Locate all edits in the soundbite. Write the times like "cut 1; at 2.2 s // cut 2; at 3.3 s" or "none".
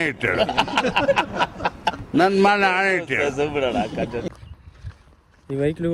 cut 1; at 4.3 s